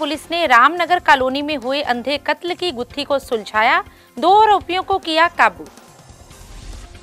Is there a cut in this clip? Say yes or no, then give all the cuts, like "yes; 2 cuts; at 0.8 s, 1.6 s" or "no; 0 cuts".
no; 0 cuts